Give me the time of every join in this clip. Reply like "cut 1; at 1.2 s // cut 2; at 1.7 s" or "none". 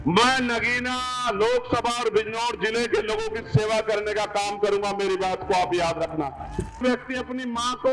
cut 1; at 6.8 s